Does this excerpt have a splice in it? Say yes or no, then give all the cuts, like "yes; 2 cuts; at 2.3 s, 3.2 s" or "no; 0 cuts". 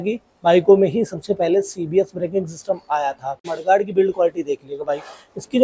yes; 1 cut; at 3.5 s